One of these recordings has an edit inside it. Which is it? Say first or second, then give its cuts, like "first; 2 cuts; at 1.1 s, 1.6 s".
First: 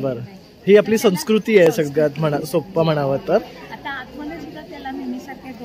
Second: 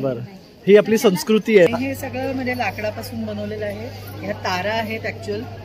second; 1 cut; at 1.7 s